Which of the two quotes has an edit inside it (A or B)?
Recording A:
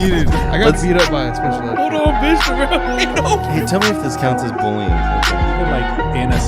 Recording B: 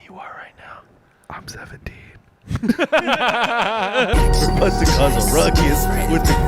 B